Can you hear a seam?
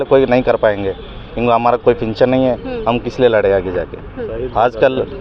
no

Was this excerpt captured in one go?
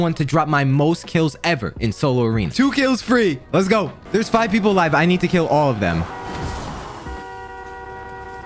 yes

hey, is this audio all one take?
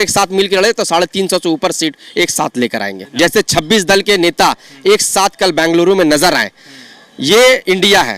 no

